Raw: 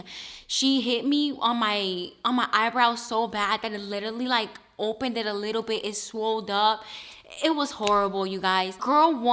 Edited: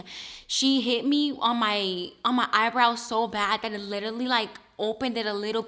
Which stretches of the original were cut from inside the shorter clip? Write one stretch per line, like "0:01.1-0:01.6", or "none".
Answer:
none